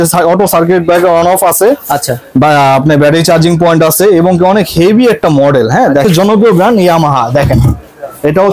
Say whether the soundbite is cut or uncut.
cut